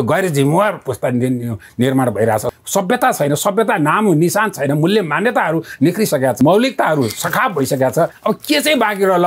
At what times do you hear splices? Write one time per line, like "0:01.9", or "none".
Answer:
0:02.5
0:06.4
0:08.2